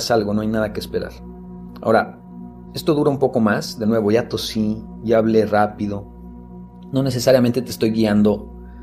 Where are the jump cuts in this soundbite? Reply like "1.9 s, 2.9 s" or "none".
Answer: none